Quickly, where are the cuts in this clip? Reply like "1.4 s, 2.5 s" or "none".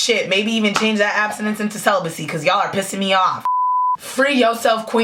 3.5 s